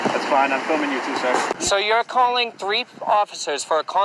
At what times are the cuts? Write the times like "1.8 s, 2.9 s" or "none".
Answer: 1.5 s

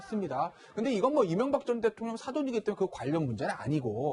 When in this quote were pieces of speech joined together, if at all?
none

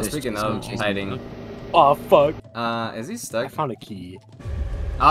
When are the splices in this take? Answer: 2.5 s

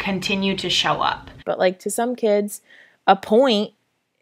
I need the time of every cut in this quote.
1.3 s

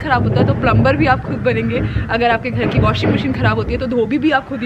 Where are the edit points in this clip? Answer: none

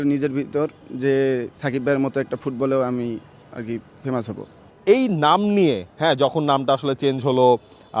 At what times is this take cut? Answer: none

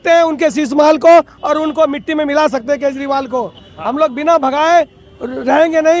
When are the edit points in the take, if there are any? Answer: none

